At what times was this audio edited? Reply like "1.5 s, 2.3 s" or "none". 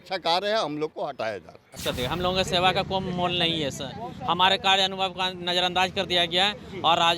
1.8 s